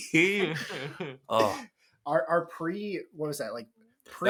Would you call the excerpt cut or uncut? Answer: uncut